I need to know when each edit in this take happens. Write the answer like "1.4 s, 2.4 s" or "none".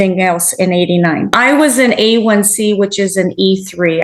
1.3 s